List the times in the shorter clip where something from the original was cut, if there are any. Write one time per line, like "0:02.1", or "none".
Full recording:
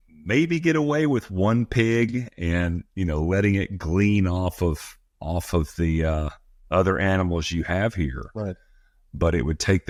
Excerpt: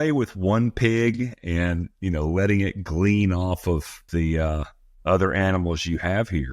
0:04.0